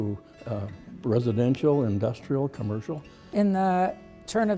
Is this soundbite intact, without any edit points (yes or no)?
yes